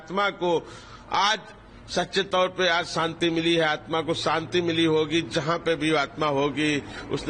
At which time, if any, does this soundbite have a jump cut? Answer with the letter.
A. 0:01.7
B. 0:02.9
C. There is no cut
C